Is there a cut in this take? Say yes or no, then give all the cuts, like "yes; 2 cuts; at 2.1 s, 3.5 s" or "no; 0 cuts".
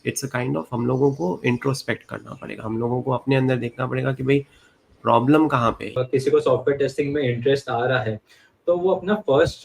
yes; 1 cut; at 6.0 s